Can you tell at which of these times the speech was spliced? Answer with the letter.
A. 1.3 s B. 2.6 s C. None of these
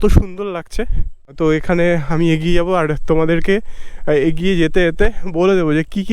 A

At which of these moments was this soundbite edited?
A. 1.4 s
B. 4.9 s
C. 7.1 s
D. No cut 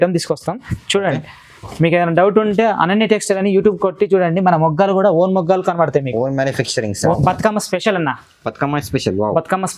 C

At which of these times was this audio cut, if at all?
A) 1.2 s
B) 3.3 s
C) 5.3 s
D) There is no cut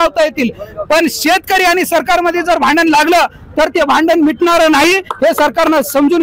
D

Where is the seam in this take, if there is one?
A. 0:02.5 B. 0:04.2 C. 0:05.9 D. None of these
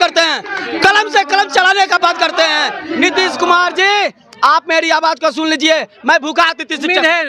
D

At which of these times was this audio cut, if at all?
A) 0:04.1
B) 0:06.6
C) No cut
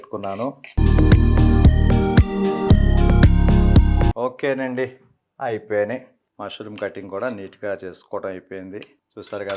C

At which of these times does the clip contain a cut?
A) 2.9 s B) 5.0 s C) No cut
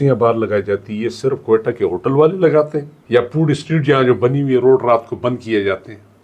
A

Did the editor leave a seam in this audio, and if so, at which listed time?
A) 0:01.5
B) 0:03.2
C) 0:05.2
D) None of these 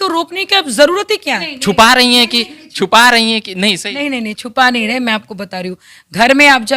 A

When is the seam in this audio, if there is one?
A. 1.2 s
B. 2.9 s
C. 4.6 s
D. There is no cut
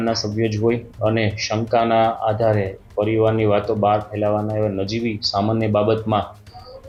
D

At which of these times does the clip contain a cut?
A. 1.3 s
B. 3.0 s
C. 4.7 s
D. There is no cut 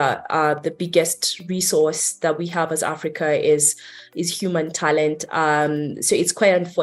D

